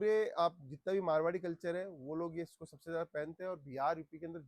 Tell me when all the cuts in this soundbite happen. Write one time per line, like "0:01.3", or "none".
none